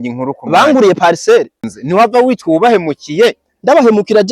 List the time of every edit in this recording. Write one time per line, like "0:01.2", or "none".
0:01.7

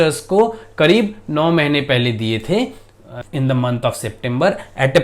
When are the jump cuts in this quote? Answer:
0:03.1

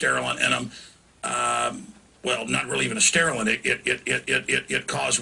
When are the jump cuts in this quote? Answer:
0:02.7

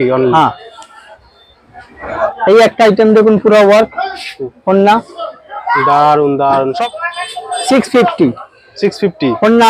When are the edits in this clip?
0:02.1
0:06.7

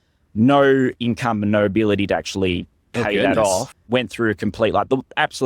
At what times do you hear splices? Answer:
0:03.7

